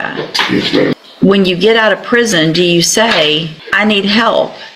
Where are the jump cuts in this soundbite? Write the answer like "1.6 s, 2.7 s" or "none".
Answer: 0.9 s, 3.6 s